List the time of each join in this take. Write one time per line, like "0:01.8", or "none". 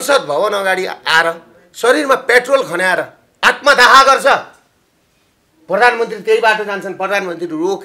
none